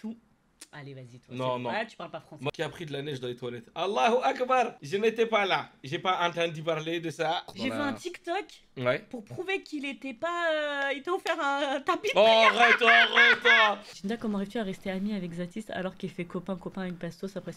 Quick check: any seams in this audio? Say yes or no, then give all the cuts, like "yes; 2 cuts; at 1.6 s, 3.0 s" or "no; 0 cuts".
yes; 3 cuts; at 2.5 s, 7.5 s, 13.9 s